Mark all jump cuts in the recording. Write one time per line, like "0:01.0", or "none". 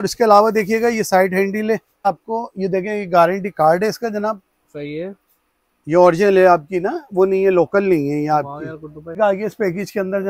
0:02.0
0:09.0